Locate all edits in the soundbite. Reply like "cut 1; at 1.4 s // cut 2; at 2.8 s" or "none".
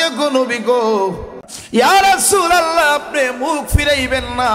cut 1; at 1.4 s